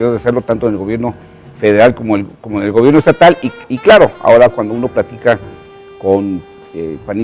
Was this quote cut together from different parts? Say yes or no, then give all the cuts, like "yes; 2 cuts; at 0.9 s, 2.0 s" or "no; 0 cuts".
no; 0 cuts